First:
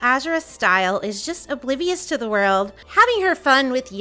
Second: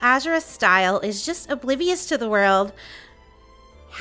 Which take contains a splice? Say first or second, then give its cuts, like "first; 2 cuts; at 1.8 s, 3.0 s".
first; 1 cut; at 2.8 s